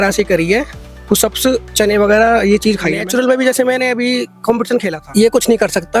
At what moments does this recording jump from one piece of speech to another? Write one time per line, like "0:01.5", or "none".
0:03.0
0:05.0